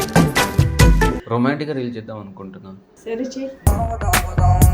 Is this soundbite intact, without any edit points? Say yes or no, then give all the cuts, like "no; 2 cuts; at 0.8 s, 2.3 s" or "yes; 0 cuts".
no; 1 cut; at 1.2 s